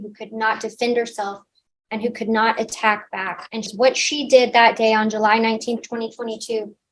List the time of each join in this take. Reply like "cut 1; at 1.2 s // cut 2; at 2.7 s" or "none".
cut 1; at 3.7 s

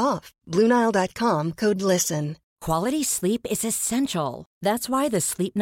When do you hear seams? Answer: cut 1; at 2.4 s

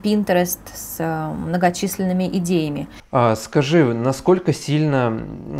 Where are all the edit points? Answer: cut 1; at 2.9 s

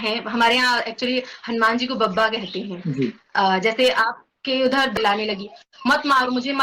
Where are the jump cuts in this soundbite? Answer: cut 1; at 5.0 s

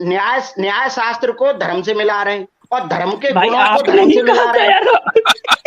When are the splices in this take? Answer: cut 1; at 2.5 s

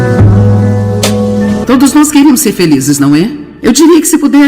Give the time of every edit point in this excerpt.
cut 1; at 1.6 s

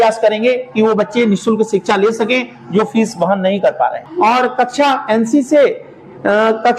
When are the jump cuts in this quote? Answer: cut 1; at 4.1 s

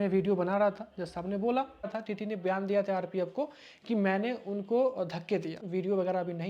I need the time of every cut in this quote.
cut 1; at 2.0 s // cut 2; at 5.6 s

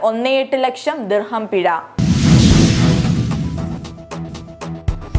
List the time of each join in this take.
cut 1; at 1.9 s

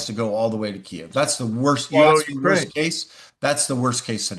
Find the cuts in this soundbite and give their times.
none

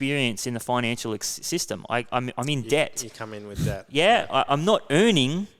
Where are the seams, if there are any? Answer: none

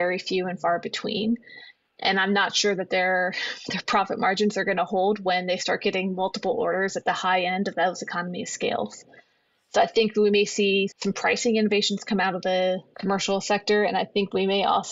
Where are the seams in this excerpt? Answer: cut 1; at 12.9 s

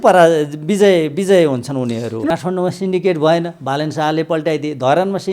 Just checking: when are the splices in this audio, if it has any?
cut 1; at 2.3 s

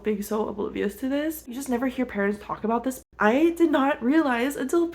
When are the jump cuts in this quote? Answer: cut 1; at 1.6 s // cut 2; at 3.0 s

